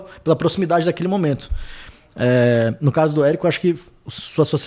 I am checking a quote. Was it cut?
no; 0 cuts

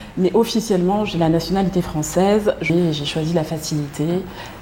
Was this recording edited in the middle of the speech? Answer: yes; 1 cut; at 2.7 s

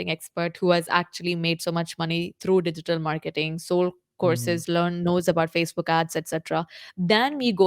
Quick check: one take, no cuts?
no; 1 cut; at 6.7 s

